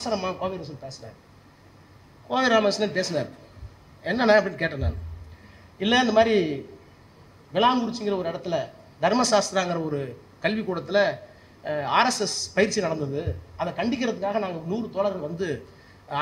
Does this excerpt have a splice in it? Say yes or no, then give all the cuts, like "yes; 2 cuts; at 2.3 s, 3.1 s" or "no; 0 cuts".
no; 0 cuts